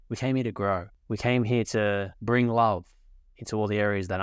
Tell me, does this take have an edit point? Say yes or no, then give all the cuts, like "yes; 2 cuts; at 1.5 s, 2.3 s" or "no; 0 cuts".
yes; 2 cuts; at 0.9 s, 2.1 s